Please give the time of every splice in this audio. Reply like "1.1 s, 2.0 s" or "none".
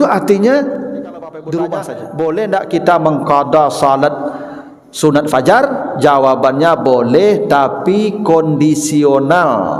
2.0 s